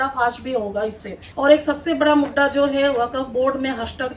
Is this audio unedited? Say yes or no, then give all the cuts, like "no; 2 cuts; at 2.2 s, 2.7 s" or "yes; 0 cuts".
no; 1 cut; at 1.2 s